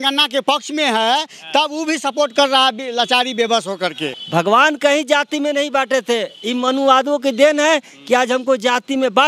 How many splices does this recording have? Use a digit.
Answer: 1